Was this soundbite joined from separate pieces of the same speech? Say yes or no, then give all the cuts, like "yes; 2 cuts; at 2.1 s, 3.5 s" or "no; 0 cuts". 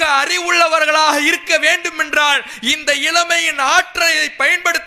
no; 0 cuts